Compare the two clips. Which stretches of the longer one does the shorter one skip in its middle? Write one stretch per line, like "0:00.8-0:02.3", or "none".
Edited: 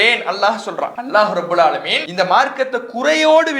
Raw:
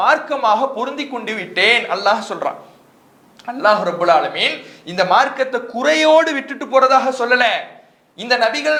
0:02.6-0:03.5
0:04.5-0:04.8